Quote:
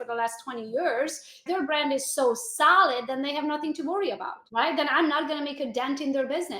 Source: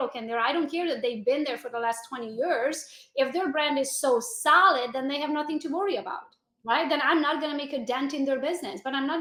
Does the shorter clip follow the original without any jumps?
no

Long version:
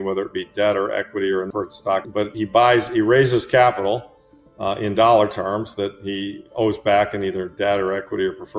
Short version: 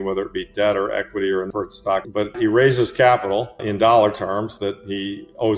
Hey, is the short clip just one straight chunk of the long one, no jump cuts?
no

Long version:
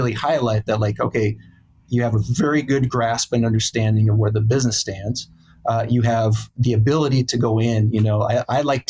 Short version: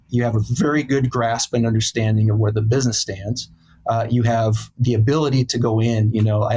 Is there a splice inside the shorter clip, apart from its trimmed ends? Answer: no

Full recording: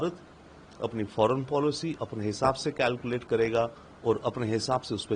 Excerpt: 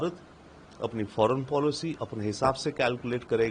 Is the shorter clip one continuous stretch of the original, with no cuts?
yes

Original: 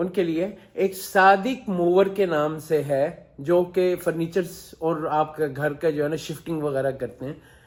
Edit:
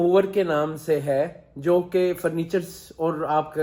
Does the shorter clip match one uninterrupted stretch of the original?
yes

